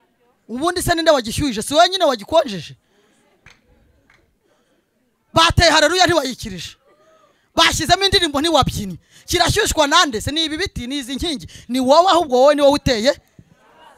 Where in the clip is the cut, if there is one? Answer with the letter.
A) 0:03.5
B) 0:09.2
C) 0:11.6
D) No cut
D